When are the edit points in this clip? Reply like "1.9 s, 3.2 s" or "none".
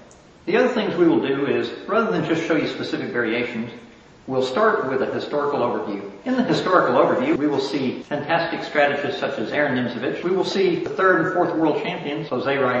none